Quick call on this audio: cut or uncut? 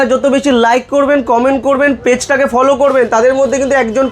uncut